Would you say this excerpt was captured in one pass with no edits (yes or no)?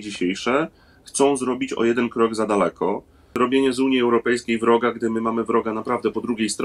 no